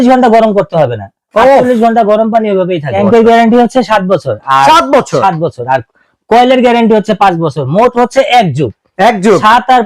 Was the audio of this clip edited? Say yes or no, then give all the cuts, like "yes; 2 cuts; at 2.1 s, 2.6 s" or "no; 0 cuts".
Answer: yes; 1 cut; at 2.9 s